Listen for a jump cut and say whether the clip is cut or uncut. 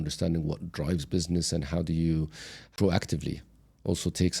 cut